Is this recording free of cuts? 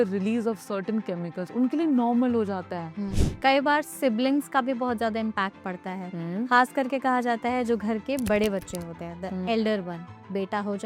no; 1 cut; at 3.1 s

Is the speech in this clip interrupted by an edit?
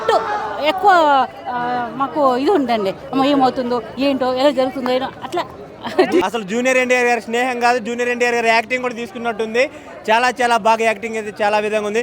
yes; 1 cut; at 6.2 s

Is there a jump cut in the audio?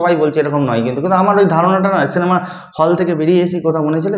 no; 0 cuts

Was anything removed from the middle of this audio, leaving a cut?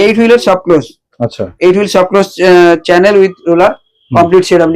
no; 0 cuts

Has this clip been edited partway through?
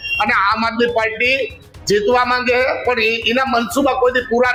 no; 0 cuts

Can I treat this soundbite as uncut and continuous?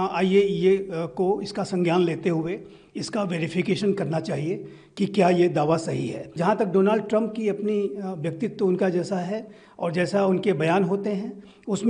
no; 1 cut; at 6.3 s

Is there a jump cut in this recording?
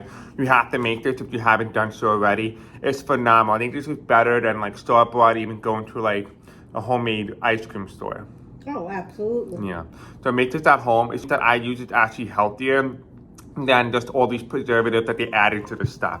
yes; 1 cut; at 11.2 s

